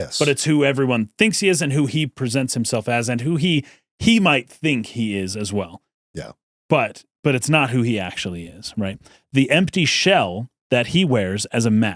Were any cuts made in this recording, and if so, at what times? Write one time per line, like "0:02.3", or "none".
none